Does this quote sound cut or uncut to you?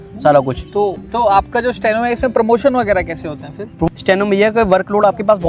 cut